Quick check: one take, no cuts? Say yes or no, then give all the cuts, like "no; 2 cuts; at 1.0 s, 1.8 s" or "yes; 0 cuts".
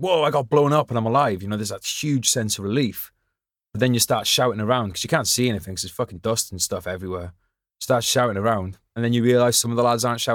yes; 0 cuts